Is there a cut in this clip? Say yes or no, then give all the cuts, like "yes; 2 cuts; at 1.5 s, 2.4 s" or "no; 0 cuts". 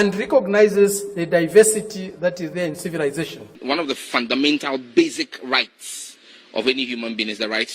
yes; 1 cut; at 3.6 s